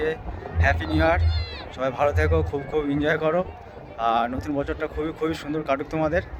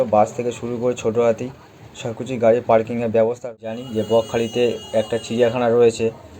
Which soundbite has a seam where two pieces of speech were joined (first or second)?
second